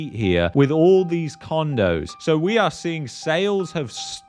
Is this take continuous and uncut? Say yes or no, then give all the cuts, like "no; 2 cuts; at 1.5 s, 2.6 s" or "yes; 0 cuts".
no; 1 cut; at 2.1 s